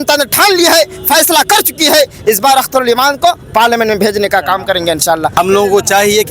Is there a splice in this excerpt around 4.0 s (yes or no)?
no